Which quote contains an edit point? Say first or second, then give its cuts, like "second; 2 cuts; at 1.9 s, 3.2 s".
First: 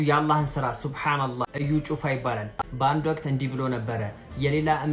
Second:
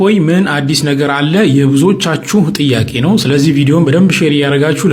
first; 2 cuts; at 1.4 s, 2.5 s